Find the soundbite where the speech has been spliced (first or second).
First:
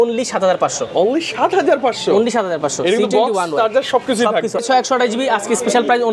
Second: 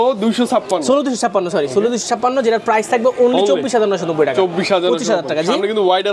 first